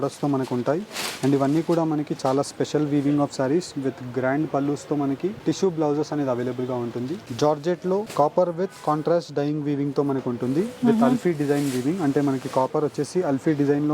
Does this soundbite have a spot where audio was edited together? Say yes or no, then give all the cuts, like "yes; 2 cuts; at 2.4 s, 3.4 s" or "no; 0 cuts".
yes; 3 cuts; at 5.4 s, 7.2 s, 8.1 s